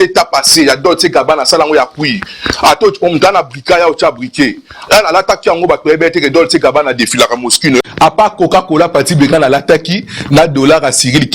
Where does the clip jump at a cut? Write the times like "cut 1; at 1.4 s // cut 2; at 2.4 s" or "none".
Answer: cut 1; at 7.8 s